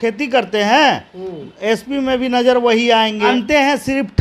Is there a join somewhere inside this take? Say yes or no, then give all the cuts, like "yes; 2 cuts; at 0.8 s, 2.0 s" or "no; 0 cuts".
yes; 1 cut; at 3.3 s